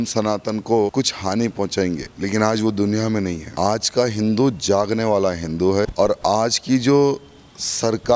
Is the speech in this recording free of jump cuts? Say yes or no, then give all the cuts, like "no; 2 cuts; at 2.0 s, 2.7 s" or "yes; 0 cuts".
no; 4 cuts; at 0.9 s, 2.1 s, 3.4 s, 5.9 s